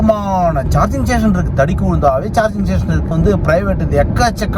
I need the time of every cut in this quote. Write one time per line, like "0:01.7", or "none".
0:03.1